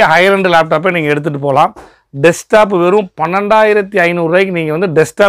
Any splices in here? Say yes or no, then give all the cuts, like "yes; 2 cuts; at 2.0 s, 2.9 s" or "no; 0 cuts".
no; 0 cuts